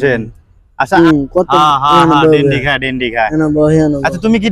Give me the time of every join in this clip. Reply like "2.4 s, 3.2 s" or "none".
1.0 s